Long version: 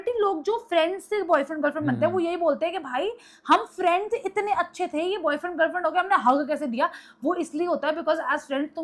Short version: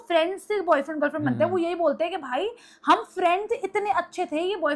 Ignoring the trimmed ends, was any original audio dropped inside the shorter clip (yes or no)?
no